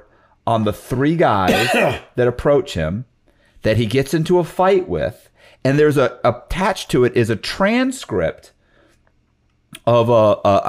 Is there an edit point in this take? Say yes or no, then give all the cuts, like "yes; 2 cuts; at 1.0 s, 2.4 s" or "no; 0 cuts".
no; 0 cuts